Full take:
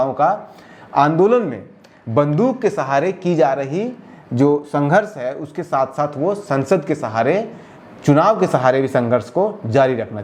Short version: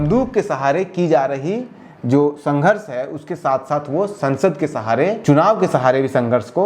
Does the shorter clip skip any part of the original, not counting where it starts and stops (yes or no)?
yes